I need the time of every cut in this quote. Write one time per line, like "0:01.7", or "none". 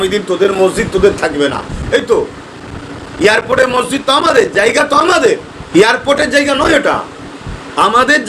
0:05.5